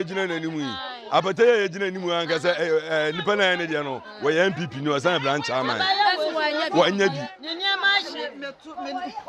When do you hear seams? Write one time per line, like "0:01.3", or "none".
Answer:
none